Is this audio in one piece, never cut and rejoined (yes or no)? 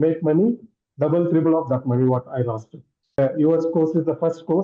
no